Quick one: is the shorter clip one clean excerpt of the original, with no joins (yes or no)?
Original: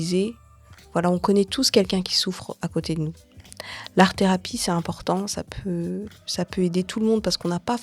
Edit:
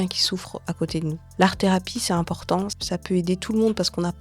no